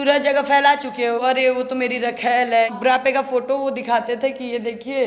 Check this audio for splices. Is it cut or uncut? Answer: cut